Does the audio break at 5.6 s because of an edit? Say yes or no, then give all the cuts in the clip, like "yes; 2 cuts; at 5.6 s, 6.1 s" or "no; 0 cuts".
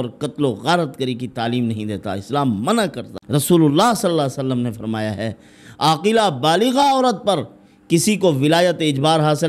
no; 1 cut; at 3.1 s